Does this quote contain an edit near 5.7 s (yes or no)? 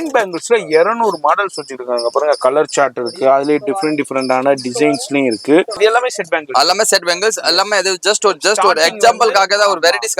yes